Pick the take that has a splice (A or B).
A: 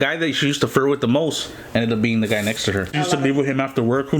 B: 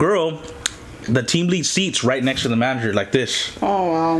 A